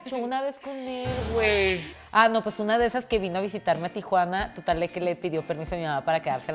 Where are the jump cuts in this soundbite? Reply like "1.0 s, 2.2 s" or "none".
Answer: 1.9 s